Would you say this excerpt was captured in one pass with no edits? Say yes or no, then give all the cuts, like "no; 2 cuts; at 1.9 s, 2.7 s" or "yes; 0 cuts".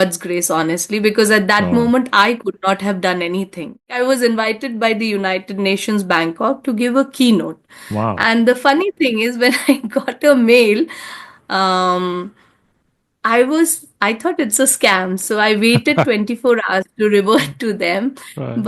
no; 1 cut; at 3.9 s